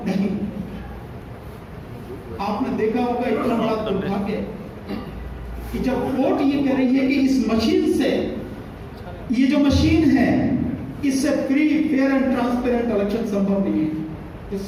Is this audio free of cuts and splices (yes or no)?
yes